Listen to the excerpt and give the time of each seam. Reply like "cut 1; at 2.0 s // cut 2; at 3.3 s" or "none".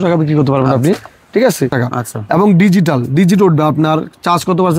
cut 1; at 1.7 s